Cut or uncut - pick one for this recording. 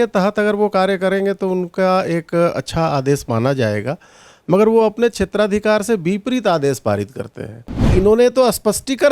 cut